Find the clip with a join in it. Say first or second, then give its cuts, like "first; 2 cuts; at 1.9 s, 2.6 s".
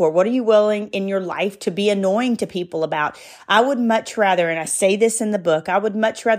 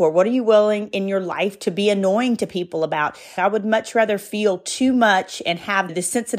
second; 1 cut; at 3.3 s